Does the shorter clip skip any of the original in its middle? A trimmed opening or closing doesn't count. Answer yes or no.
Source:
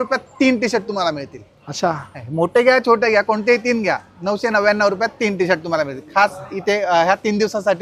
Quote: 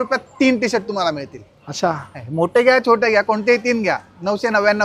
no